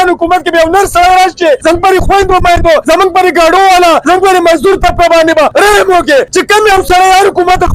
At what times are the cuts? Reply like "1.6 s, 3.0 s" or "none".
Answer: 1.6 s, 2.8 s, 4.0 s, 5.5 s, 6.3 s